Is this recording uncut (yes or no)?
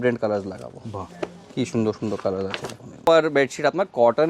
no